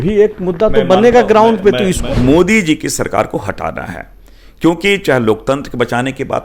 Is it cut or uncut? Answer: cut